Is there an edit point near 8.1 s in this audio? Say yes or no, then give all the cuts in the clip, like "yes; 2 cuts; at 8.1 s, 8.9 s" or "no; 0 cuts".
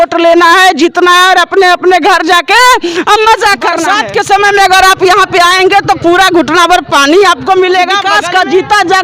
yes; 2 cuts; at 3.8 s, 8.1 s